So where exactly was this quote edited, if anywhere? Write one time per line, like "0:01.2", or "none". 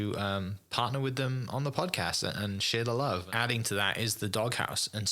0:03.3